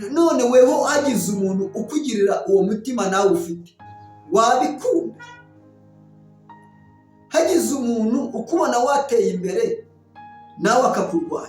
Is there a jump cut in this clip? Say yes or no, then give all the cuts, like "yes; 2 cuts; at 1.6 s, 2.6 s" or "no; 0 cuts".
yes; 2 cuts; at 5.4 s, 6.9 s